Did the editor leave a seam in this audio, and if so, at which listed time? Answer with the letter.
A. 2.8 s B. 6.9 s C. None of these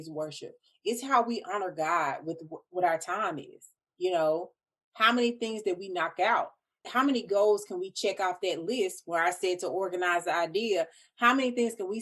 B